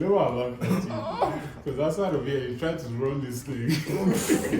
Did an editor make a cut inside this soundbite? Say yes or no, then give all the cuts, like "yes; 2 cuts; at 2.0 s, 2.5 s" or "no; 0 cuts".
no; 0 cuts